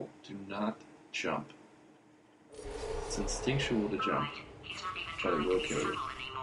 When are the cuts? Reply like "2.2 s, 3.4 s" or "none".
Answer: none